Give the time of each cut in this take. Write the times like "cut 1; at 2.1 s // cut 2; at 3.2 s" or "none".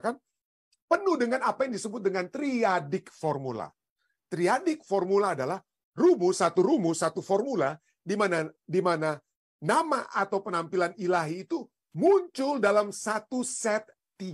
none